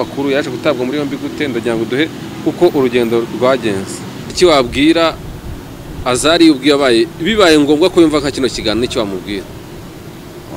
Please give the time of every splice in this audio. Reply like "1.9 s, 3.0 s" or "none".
4.3 s